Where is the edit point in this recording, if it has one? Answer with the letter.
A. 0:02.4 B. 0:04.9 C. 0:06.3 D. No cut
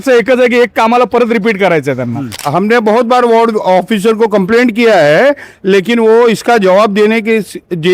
A